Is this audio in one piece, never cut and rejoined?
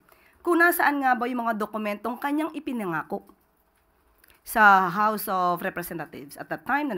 yes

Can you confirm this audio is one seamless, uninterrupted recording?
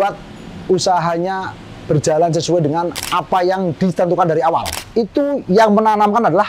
no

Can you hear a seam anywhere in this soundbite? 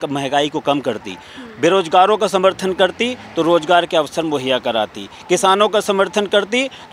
no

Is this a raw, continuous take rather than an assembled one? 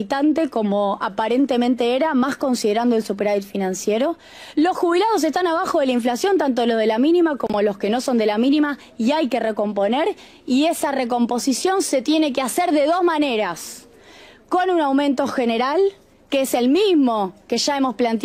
yes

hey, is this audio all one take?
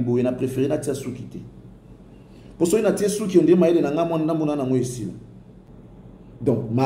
no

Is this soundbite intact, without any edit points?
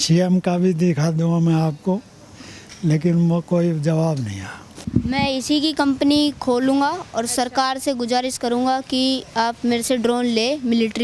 no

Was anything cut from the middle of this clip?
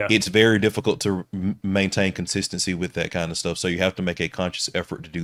no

